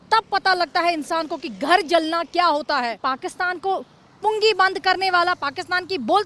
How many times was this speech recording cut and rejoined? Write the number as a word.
one